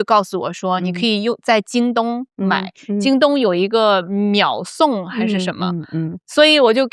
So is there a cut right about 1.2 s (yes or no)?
no